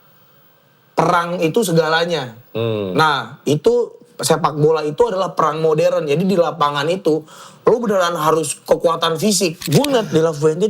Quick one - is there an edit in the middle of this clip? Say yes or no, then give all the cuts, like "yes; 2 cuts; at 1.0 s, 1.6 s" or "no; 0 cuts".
yes; 1 cut; at 9.6 s